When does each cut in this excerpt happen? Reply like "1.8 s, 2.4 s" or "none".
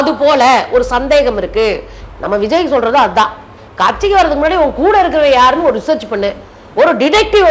1.9 s